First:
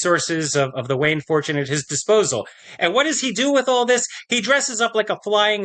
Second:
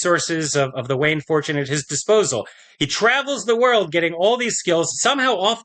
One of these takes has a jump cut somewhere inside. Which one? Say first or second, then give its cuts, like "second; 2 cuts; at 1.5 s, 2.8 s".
first; 1 cut; at 2.6 s